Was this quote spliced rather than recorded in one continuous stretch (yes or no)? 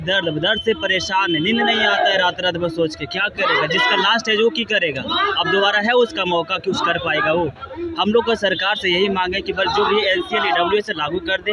no